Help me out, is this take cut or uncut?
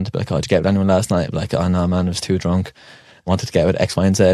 cut